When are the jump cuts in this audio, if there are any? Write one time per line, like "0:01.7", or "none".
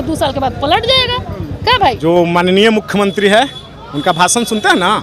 0:02.0